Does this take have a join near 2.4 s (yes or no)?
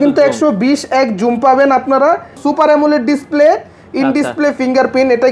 yes